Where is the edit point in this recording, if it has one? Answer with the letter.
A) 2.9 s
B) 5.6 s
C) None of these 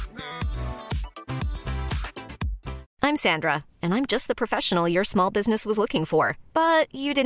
A